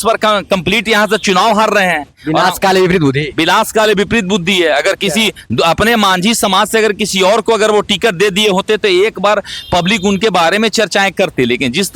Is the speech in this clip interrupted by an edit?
no; 0 cuts

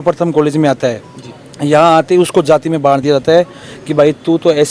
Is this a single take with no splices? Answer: yes; 0 cuts

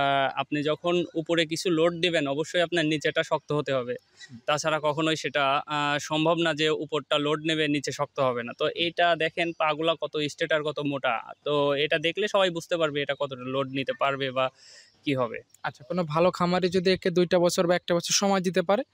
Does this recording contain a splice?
no; 0 cuts

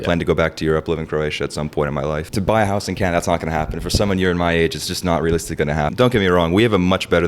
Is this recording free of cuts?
no; 2 cuts; at 2.3 s, 5.9 s

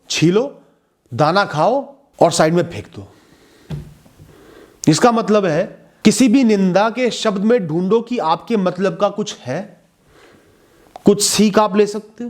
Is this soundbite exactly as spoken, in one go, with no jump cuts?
no; 2 cuts; at 2.0 s, 5.8 s

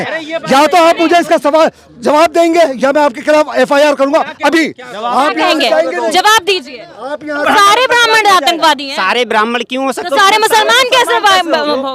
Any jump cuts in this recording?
yes; 1 cut; at 7.4 s

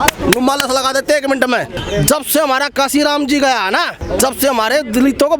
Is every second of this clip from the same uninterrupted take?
no; 2 cuts; at 1.7 s, 4.0 s

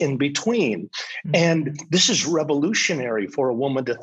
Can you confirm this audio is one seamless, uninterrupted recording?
yes; 0 cuts

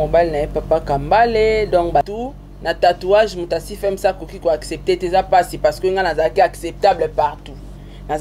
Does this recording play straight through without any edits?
no; 1 cut; at 2.1 s

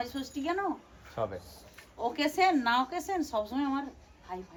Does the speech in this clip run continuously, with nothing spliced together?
yes; 0 cuts

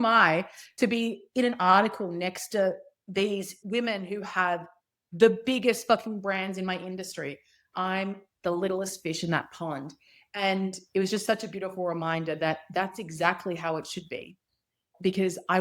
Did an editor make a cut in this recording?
yes; 1 cut; at 3.6 s

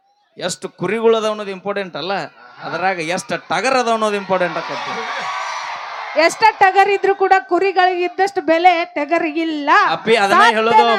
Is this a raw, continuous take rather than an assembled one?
yes; 0 cuts

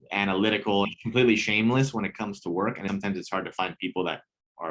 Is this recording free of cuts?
no; 2 cuts; at 0.9 s, 2.9 s

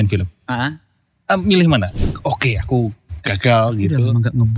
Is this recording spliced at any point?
yes; 1 cut; at 1.9 s

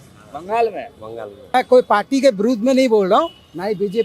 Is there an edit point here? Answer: yes; 1 cut; at 1.5 s

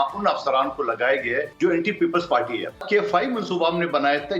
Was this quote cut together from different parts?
yes; 2 cuts; at 1.5 s, 2.8 s

